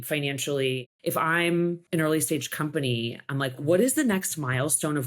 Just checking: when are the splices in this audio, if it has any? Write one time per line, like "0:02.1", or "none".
0:00.9
0:01.8
0:03.6